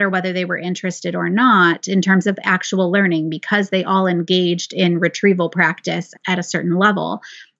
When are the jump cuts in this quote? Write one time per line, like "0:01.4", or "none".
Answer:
0:06.1